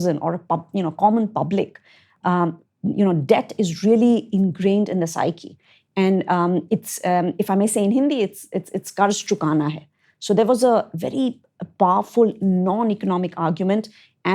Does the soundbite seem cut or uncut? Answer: uncut